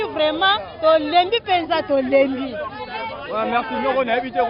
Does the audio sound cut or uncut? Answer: uncut